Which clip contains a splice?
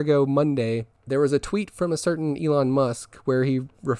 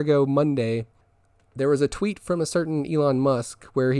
first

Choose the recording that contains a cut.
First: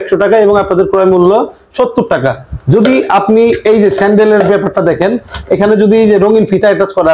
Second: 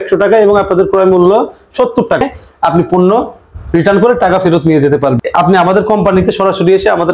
second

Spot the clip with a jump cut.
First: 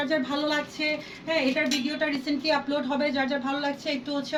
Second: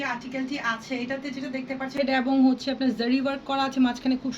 second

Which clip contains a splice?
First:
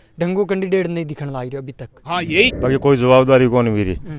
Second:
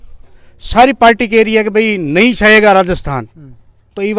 first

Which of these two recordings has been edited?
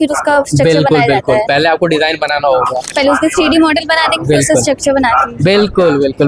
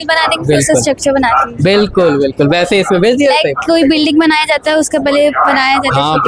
first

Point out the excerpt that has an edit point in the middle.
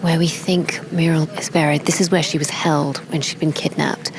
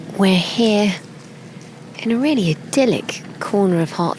first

